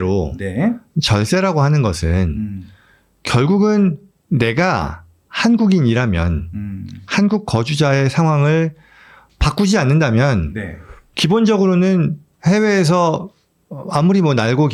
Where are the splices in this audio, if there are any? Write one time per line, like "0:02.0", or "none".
none